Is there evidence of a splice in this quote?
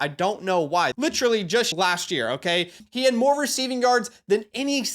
yes; 3 cuts; at 0.9 s, 1.7 s, 2.8 s

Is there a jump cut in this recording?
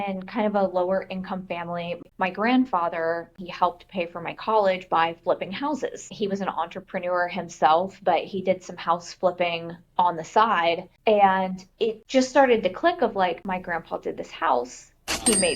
yes; 4 cuts; at 2.0 s, 3.4 s, 10.9 s, 12.0 s

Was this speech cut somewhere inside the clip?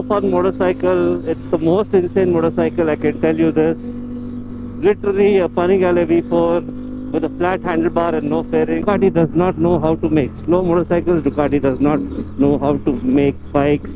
yes; 1 cut; at 8.8 s

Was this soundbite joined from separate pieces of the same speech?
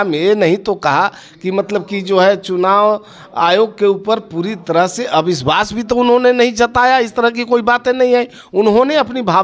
no; 0 cuts

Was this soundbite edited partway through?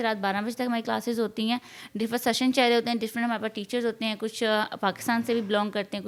no; 0 cuts

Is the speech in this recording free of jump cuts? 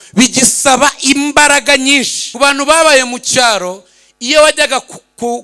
no; 1 cut; at 2.2 s

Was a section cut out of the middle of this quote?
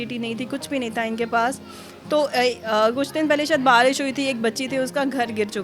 no; 0 cuts

